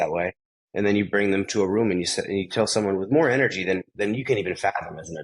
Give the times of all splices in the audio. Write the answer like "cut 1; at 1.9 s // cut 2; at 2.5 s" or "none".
none